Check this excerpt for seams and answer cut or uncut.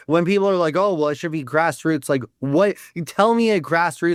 uncut